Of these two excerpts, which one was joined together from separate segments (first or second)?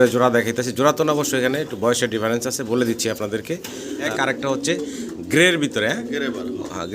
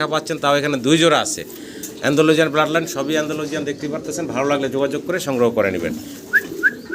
first